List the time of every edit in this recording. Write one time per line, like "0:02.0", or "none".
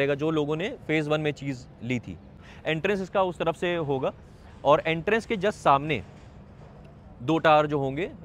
0:02.5